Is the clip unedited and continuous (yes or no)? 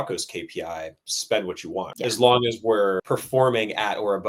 no